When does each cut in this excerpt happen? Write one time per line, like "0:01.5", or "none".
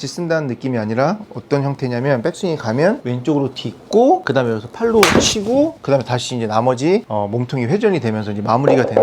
0:03.1
0:04.3
0:05.8
0:07.1